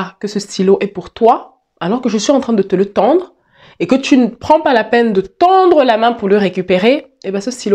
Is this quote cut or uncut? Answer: uncut